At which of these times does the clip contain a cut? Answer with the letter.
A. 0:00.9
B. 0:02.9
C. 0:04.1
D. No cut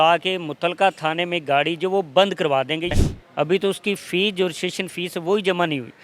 B